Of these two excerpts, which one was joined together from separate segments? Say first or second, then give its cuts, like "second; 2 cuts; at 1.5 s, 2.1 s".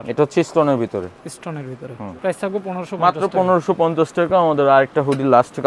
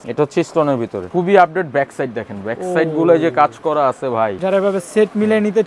second; 2 cuts; at 1.0 s, 4.4 s